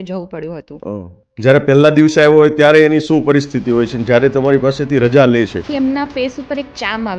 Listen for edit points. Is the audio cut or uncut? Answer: cut